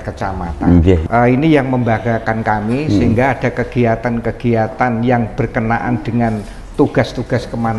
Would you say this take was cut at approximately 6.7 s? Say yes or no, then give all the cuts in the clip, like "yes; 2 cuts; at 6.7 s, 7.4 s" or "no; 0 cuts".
no; 1 cut; at 1.0 s